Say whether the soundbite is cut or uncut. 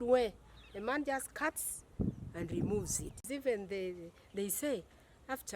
cut